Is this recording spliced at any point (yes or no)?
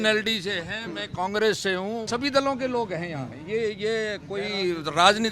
yes